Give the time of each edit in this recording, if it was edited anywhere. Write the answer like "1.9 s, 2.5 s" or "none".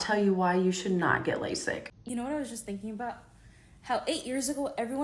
2.0 s